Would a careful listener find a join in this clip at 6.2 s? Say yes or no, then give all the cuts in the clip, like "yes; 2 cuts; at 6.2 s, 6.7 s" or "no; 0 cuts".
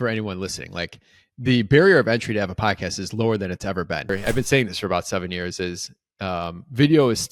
no; 1 cut; at 4.1 s